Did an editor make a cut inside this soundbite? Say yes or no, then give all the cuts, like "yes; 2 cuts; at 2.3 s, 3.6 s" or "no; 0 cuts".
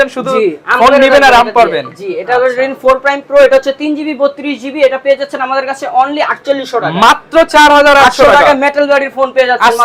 no; 0 cuts